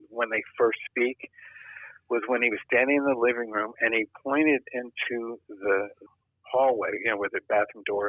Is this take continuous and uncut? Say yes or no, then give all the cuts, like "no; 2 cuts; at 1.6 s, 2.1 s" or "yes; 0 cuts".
yes; 0 cuts